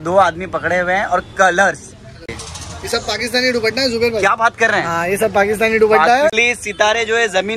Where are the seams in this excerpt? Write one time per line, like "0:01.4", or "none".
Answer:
0:02.2
0:06.4